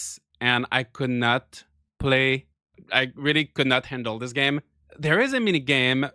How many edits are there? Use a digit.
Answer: 2